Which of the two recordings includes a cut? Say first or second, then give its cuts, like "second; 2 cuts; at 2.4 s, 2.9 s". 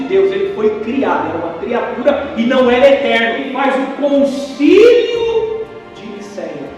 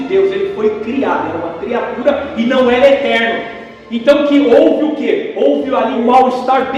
first; 1 cut; at 3.5 s